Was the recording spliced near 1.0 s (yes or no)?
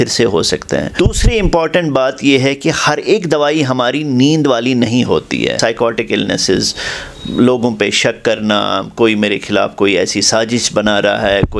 yes